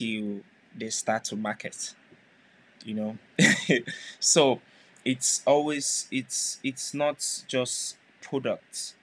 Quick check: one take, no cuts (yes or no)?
yes